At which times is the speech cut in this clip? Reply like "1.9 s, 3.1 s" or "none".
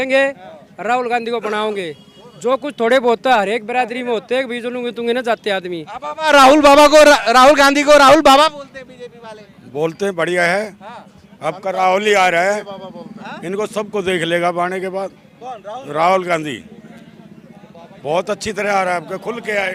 none